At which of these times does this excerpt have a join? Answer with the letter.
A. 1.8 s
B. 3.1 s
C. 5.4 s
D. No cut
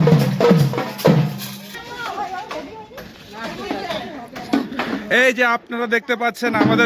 A